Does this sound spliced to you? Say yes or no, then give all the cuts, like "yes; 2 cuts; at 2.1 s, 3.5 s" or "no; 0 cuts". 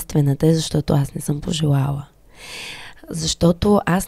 no; 0 cuts